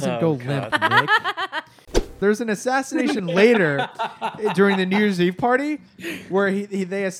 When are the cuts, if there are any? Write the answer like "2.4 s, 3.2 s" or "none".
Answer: 2.0 s